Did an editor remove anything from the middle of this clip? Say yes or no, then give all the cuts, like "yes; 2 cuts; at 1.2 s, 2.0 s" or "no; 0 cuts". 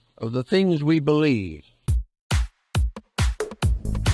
yes; 1 cut; at 1.8 s